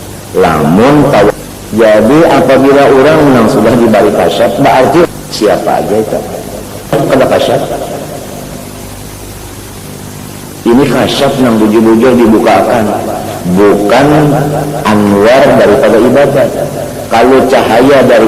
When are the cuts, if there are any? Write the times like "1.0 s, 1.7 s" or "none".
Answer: 1.3 s, 5.1 s, 6.9 s